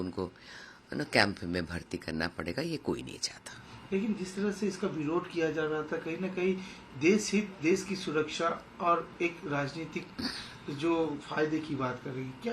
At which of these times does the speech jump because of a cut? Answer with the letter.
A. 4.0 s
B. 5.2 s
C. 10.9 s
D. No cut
D